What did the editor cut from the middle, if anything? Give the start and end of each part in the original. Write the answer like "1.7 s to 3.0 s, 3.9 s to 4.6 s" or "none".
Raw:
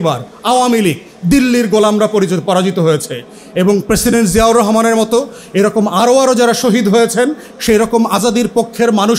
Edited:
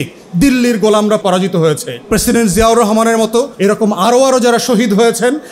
2.1 s to 2.4 s, 3.3 s to 3.8 s, 5.3 s to 5.5 s